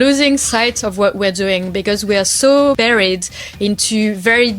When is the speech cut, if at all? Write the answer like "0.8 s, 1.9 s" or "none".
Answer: 2.8 s